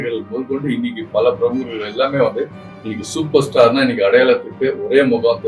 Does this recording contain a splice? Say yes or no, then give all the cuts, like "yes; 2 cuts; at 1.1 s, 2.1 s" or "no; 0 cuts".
no; 0 cuts